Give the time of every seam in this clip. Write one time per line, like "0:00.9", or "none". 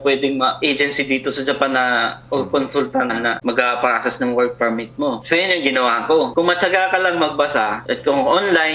0:06.3